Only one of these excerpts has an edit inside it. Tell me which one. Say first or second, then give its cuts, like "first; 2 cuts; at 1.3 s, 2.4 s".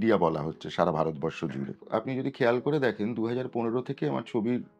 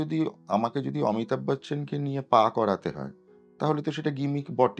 first; 1 cut; at 1.8 s